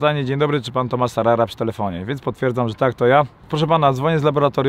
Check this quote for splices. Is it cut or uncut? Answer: cut